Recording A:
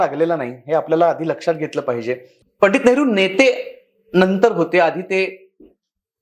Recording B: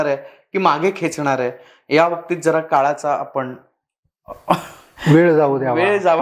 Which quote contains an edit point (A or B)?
A